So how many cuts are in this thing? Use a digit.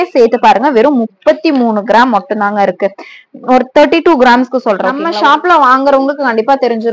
1